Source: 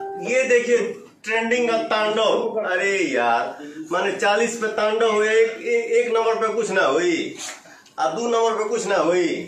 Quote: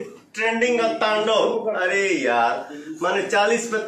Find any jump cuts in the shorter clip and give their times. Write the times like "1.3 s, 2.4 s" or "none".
none